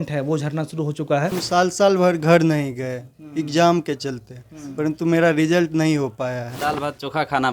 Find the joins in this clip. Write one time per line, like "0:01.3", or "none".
0:01.4
0:06.6